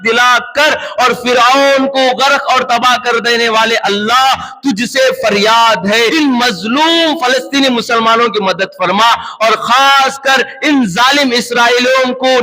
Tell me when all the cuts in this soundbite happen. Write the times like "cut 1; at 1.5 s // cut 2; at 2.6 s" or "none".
cut 1; at 6.1 s